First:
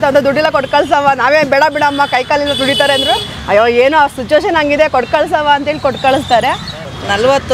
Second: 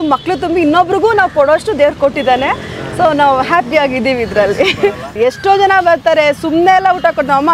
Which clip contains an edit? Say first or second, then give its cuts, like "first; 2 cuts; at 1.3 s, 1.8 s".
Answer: second; 1 cut; at 5.1 s